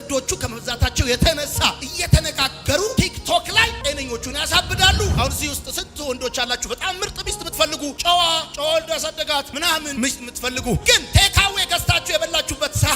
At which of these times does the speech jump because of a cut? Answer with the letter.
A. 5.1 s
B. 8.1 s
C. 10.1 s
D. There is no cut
A